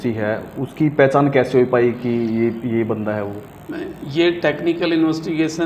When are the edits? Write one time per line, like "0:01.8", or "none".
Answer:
none